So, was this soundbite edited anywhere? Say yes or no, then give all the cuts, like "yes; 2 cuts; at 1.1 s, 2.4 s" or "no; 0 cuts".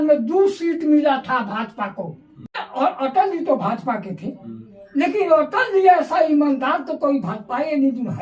yes; 1 cut; at 2.6 s